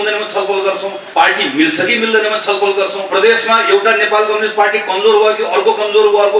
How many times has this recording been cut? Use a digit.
2